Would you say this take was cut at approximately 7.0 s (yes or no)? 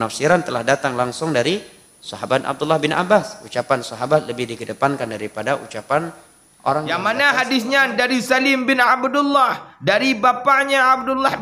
yes